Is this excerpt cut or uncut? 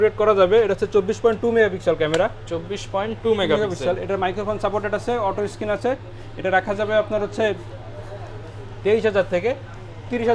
uncut